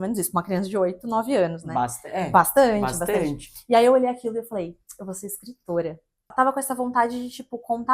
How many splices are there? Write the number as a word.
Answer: one